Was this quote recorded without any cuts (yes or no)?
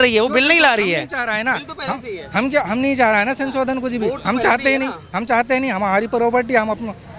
yes